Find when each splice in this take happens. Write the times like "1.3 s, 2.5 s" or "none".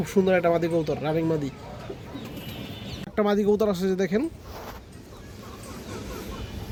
none